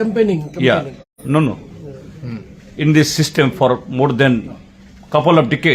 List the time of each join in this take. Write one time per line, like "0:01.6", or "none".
none